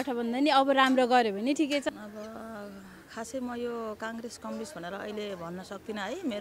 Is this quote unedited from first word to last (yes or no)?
no